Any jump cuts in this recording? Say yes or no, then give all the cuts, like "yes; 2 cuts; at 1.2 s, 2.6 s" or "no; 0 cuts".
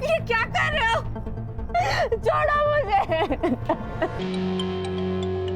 yes; 1 cut; at 4.2 s